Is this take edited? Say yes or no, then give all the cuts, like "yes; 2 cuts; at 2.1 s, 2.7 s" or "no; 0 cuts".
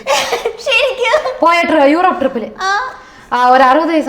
no; 0 cuts